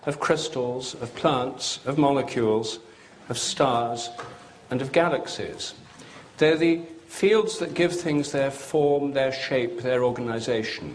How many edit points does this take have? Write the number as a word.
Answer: one